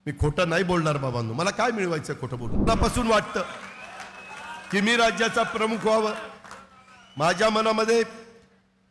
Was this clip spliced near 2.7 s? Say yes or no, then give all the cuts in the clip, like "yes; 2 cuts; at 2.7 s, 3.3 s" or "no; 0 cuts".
yes; 1 cut; at 2.7 s